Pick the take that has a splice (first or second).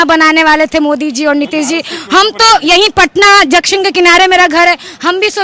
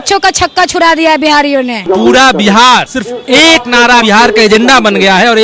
second